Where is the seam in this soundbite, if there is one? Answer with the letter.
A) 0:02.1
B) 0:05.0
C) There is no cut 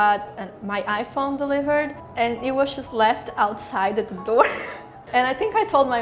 B